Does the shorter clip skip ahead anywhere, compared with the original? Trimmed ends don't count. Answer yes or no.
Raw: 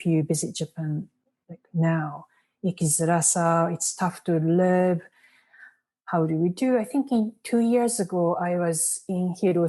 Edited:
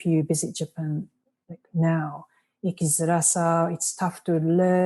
no